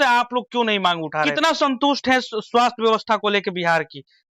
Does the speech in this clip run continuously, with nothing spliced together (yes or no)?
no